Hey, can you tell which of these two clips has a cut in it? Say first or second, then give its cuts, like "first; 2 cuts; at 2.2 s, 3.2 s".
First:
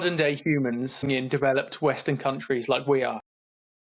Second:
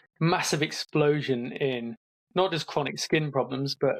first; 1 cut; at 1.1 s